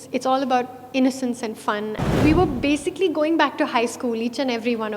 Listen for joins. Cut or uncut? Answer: cut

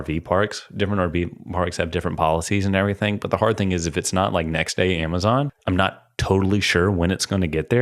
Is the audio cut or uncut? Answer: cut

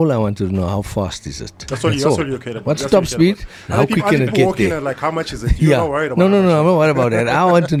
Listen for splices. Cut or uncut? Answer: uncut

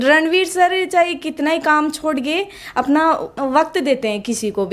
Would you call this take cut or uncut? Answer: uncut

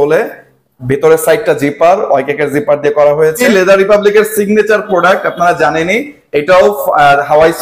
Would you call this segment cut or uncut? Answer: cut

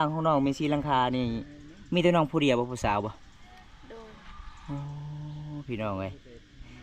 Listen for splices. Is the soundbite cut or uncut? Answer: uncut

